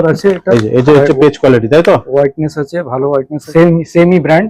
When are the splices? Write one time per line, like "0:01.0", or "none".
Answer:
0:03.4